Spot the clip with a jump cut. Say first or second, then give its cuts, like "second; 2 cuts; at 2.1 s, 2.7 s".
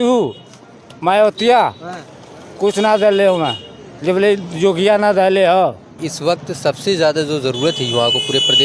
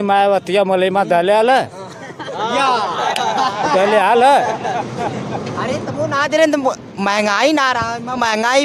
first; 1 cut; at 6.1 s